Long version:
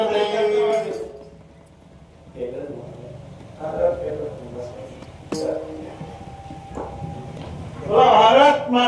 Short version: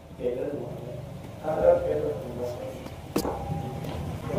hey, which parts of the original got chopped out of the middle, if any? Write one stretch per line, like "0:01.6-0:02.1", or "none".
0:05.4-0:06.7

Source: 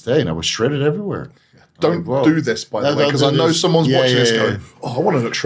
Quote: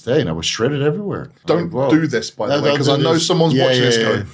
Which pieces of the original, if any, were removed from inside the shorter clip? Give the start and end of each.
0:01.3-0:01.6

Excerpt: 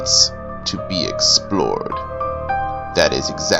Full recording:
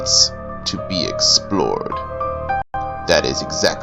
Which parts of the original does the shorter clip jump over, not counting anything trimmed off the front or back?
0:02.6-0:02.8

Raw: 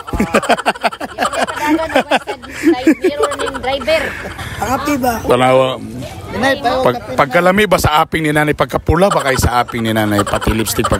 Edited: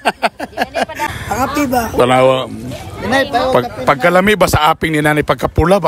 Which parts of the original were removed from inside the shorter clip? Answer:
0:01.6-0:04.3

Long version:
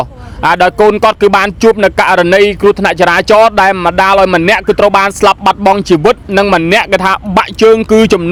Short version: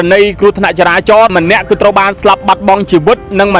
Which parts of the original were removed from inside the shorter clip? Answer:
0:03.5-0:04.3

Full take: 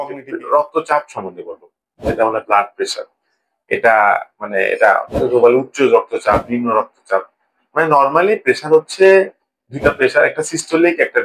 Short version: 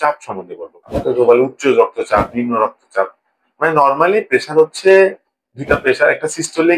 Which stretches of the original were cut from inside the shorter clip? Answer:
0:01.8-0:05.1

